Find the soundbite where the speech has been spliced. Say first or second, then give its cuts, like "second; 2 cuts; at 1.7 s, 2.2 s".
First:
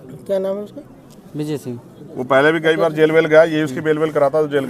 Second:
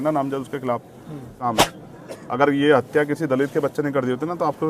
second; 1 cut; at 1.4 s